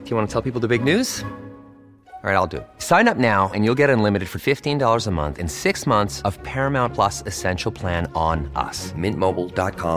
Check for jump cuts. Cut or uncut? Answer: uncut